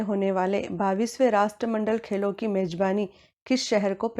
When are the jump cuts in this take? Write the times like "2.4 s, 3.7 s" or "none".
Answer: 2.7 s